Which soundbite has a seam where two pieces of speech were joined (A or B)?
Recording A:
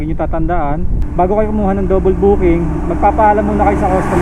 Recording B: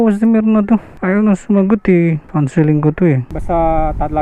B